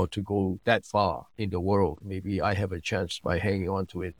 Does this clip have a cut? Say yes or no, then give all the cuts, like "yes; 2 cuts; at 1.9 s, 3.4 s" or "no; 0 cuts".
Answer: yes; 2 cuts; at 1.3 s, 2.1 s